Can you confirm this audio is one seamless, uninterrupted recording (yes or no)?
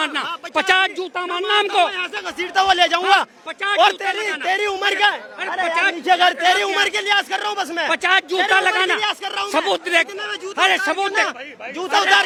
yes